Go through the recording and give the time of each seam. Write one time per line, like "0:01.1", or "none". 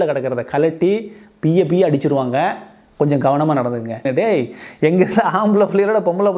0:04.0